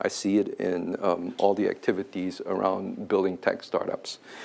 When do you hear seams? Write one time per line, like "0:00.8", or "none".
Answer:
none